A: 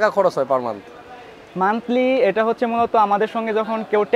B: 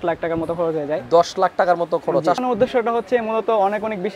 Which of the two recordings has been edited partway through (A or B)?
B